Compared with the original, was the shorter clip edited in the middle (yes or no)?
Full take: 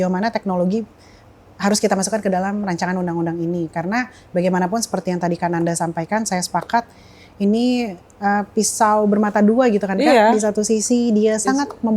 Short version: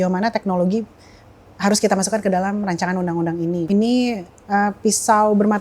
yes